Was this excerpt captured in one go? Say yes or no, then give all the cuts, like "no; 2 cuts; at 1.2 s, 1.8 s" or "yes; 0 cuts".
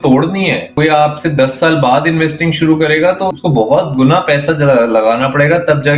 no; 1 cut; at 3.4 s